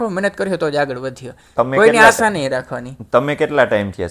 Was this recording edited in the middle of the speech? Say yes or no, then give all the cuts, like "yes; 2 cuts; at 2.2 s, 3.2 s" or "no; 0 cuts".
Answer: no; 0 cuts